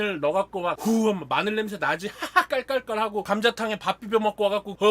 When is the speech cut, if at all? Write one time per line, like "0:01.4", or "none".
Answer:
0:03.2